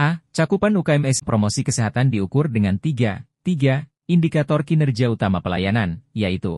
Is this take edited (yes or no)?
yes